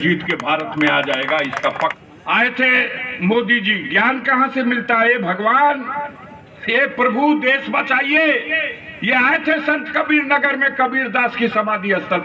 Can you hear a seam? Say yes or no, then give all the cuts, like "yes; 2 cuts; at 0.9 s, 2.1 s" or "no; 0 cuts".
yes; 1 cut; at 2.0 s